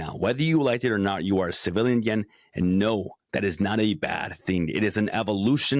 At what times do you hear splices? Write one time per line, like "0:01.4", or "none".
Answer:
none